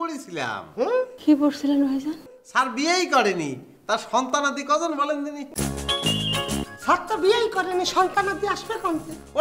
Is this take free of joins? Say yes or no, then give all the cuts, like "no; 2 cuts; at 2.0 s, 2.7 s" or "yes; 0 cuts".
no; 2 cuts; at 5.5 s, 6.6 s